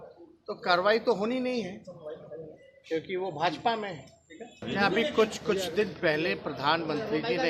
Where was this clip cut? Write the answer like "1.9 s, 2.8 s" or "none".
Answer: 4.6 s